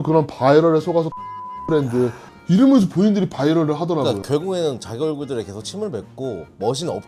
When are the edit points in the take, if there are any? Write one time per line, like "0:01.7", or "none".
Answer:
none